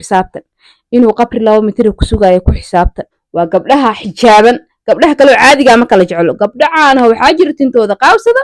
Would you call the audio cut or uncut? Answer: cut